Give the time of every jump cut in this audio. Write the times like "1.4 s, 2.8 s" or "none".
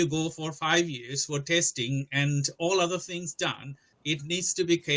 none